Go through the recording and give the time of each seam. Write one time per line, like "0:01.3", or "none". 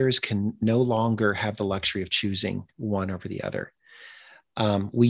none